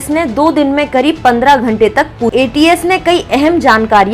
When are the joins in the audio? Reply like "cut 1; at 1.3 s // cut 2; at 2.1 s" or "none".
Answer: cut 1; at 2.3 s